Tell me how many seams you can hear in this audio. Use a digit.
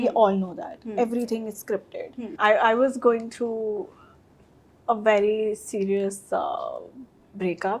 1